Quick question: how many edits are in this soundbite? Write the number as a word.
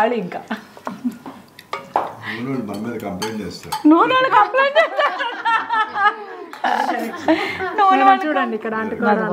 zero